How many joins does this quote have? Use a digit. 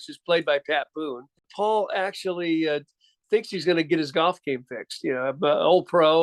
1